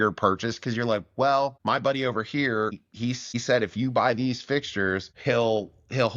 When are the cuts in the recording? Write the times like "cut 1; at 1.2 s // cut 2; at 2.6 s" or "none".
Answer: cut 1; at 1.6 s // cut 2; at 2.9 s // cut 3; at 5.1 s